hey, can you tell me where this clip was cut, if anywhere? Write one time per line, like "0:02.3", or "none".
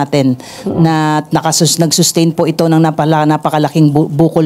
none

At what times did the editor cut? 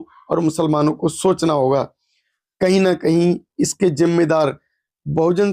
none

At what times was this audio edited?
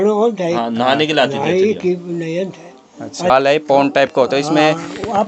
0:03.3

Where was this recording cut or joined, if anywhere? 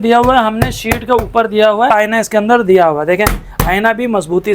0:01.9

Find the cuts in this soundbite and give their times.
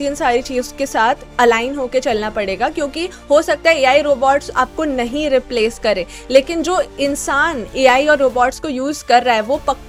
none

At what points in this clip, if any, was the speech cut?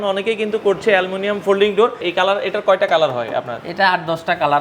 0:02.0

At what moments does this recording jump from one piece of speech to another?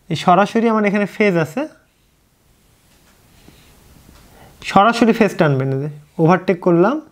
none

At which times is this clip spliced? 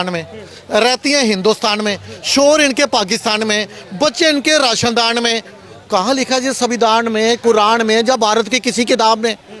none

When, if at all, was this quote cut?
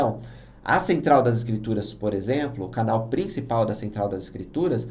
none

